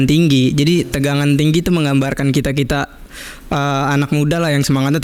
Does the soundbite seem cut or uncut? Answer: uncut